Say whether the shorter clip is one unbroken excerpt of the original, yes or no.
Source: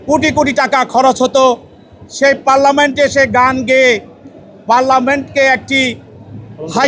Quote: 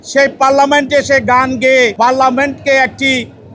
no